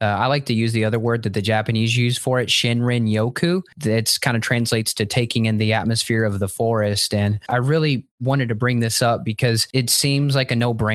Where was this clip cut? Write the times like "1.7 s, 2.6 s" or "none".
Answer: 3.7 s, 7.4 s, 9.6 s